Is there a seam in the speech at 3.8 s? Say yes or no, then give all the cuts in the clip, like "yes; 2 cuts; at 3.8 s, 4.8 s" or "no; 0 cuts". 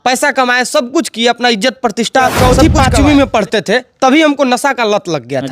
no; 1 cut; at 2.4 s